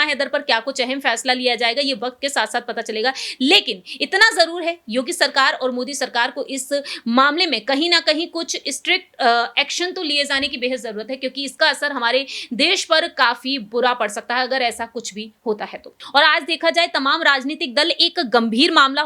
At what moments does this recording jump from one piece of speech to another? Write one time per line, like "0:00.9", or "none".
0:15.9

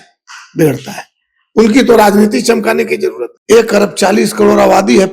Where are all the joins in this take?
0:03.3

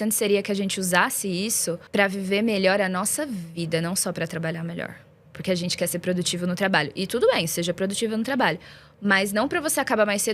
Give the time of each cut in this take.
0:01.8

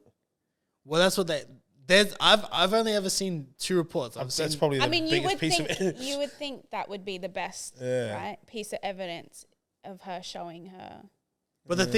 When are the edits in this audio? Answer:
none

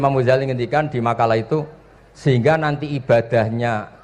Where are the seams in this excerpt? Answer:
none

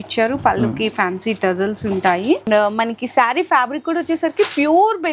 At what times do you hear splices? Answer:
0:02.5

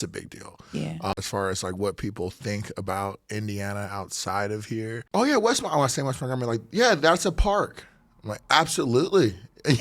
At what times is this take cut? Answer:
0:01.1
0:05.0

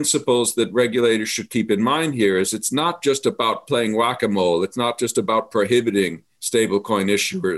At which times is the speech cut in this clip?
none

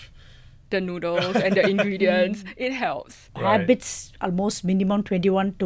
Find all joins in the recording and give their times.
0:03.2

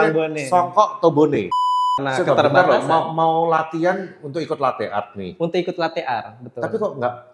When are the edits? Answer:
0:01.6

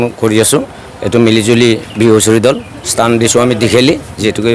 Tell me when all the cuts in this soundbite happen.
none

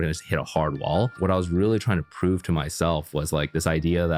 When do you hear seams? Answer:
0:01.2

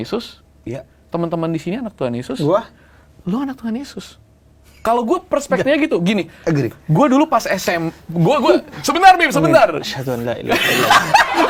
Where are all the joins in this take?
none

